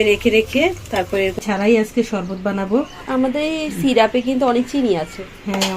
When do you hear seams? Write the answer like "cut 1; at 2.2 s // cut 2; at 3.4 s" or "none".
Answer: cut 1; at 1.4 s